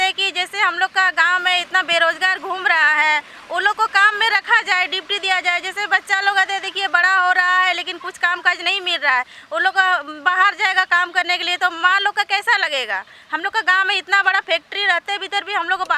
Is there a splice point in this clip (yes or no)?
no